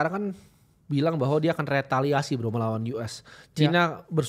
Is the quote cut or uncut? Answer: uncut